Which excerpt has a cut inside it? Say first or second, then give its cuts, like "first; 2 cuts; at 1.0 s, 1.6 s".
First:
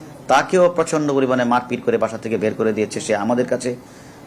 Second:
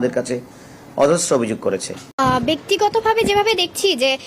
second; 1 cut; at 2.0 s